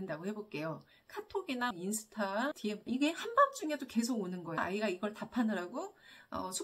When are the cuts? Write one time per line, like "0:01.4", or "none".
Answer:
0:02.9
0:04.6